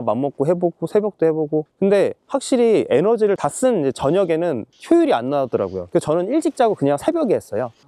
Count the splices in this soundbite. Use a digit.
3